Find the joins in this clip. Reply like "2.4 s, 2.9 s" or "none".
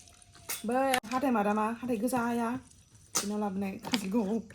1.0 s